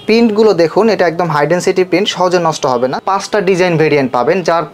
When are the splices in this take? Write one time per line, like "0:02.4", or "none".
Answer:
0:03.0